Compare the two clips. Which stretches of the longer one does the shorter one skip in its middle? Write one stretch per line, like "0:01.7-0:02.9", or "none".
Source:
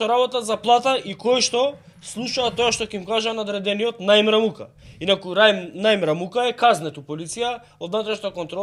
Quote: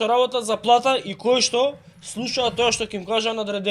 none